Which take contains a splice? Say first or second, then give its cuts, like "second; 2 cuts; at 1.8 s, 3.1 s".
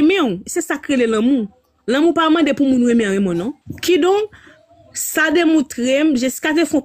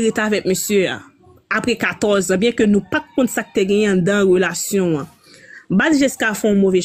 first; 1 cut; at 3.6 s